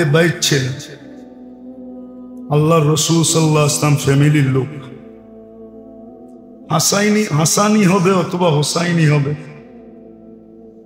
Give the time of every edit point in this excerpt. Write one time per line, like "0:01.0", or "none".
none